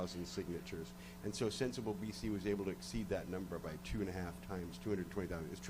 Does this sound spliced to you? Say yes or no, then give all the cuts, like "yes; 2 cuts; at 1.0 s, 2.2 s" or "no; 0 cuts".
yes; 1 cut; at 4.7 s